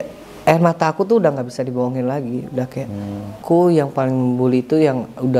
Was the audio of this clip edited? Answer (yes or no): yes